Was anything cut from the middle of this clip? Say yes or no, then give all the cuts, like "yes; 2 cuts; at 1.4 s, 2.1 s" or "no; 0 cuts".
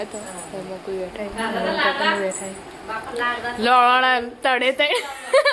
no; 0 cuts